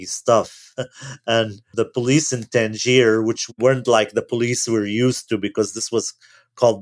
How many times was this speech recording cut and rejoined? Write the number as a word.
two